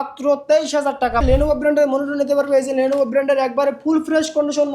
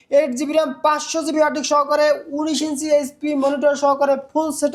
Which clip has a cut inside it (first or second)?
first